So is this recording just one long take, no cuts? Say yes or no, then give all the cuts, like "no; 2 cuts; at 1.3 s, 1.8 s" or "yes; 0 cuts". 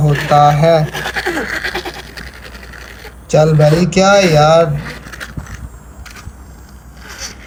yes; 0 cuts